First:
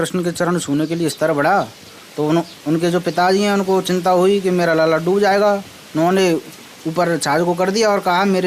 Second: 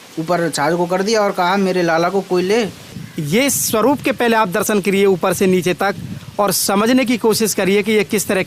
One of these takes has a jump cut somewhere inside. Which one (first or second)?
second